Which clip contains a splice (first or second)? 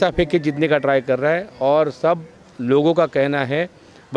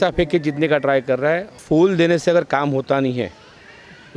second